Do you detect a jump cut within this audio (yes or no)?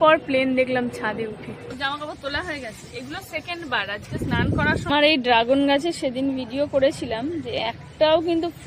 yes